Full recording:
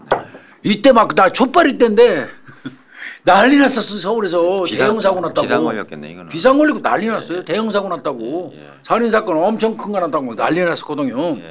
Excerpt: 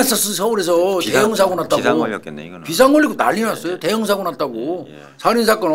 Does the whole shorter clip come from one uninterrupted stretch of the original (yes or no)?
yes